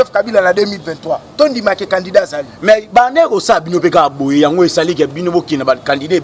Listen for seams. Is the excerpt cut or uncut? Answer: uncut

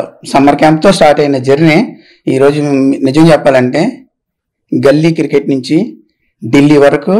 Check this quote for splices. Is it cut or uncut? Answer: uncut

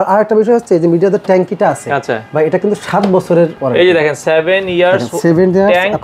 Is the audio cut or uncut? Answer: cut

